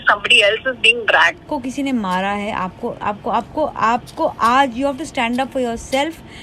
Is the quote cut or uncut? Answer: cut